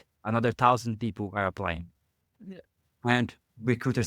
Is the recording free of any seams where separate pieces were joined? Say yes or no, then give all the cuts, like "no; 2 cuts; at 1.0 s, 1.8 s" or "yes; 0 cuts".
yes; 0 cuts